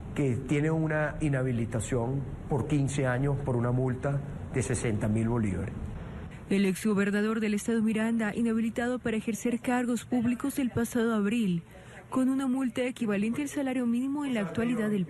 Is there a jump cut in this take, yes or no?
yes